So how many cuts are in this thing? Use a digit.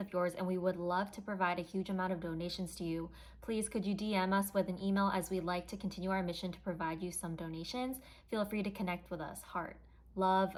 0